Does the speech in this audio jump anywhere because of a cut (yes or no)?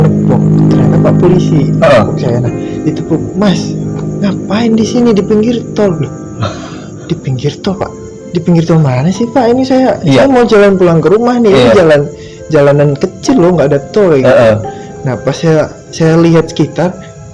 no